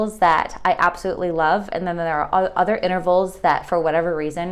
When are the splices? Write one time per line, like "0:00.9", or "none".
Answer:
none